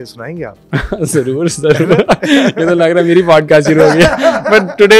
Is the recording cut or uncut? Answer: uncut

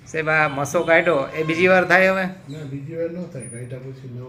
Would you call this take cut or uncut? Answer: uncut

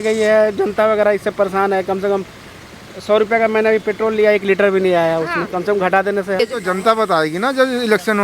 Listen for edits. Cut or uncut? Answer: cut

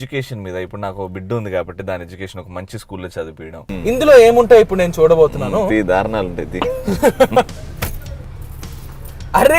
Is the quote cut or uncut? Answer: cut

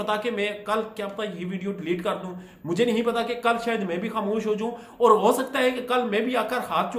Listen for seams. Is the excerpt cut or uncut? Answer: uncut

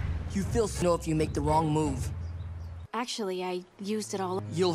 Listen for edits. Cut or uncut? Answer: uncut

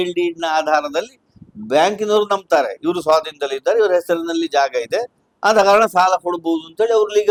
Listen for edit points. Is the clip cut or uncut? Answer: uncut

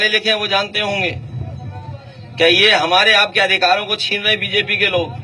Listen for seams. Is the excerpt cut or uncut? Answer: uncut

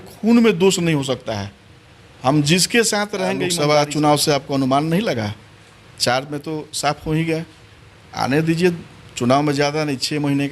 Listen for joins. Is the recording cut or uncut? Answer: cut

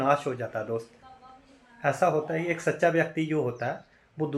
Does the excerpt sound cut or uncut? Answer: uncut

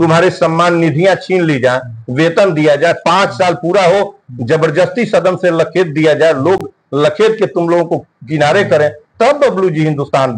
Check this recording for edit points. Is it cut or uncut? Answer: uncut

